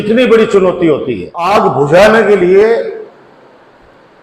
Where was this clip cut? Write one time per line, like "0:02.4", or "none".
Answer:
0:01.3